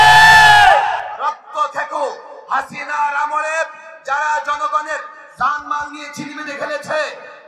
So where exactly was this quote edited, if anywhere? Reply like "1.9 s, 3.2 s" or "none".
1.1 s